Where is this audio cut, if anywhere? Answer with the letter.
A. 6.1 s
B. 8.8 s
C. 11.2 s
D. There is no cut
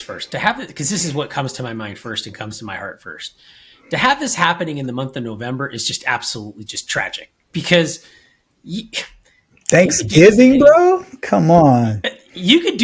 D